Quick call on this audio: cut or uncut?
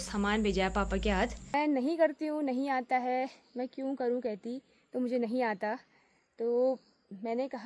cut